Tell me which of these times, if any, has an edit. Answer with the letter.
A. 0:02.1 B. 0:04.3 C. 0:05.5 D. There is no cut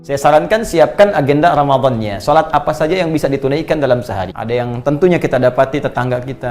B